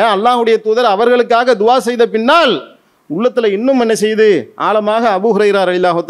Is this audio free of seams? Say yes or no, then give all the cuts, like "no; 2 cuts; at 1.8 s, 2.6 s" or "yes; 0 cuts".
yes; 0 cuts